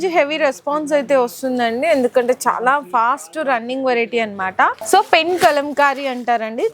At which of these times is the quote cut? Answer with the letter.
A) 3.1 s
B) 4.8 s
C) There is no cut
B